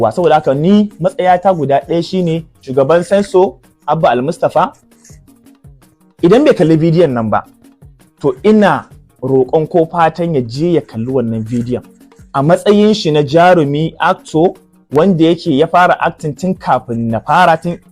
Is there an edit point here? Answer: yes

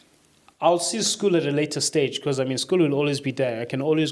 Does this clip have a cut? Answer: no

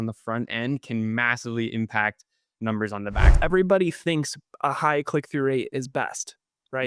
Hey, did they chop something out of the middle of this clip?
yes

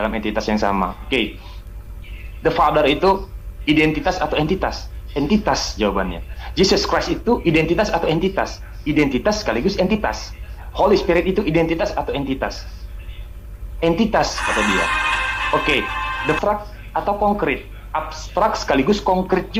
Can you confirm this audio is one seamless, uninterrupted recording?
yes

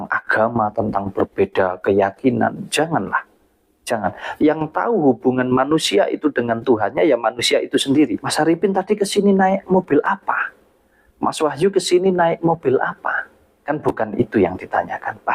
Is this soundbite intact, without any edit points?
no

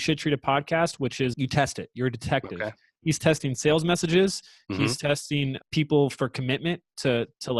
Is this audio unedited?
no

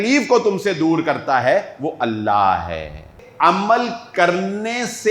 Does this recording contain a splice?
yes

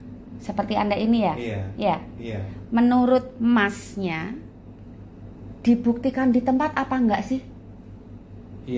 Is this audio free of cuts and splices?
yes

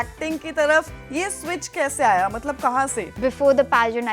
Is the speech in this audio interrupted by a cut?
yes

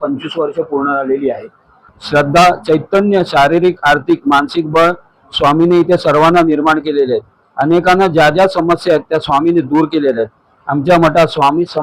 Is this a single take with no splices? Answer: yes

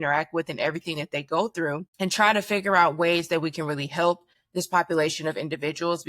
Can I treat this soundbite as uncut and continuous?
no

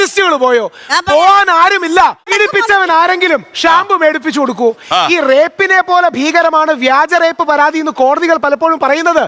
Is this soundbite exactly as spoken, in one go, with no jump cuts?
no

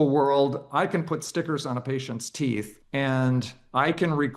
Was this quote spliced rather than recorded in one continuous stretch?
yes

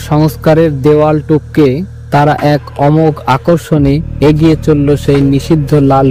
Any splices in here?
no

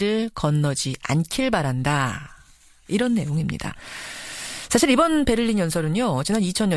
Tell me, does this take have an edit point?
no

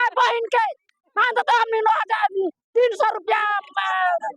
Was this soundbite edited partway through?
no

